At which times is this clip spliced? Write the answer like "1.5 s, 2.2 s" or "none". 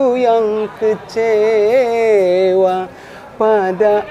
none

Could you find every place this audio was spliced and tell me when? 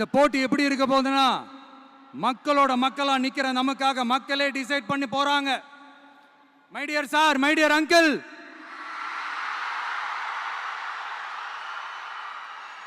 none

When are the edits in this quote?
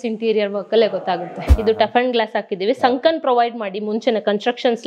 1.5 s

